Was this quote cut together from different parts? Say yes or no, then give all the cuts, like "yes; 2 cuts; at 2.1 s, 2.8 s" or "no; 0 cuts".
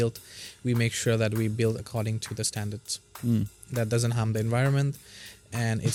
no; 0 cuts